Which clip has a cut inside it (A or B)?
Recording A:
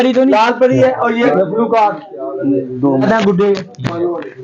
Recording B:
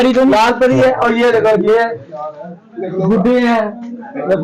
A